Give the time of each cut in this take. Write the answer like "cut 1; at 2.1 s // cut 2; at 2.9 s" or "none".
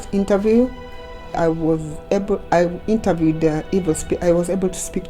cut 1; at 1.4 s